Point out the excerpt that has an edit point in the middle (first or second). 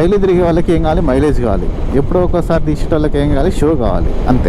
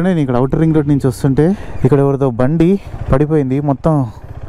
second